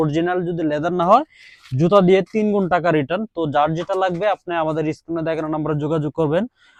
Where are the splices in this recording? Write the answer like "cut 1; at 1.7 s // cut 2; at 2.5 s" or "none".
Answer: none